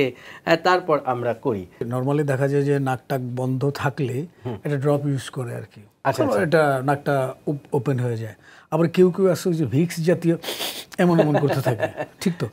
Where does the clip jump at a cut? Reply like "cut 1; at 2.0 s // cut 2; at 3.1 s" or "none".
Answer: cut 1; at 1.9 s